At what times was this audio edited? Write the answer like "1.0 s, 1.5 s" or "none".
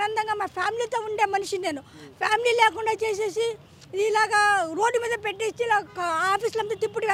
none